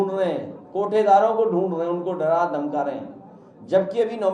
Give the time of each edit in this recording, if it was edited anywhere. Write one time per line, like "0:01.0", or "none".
none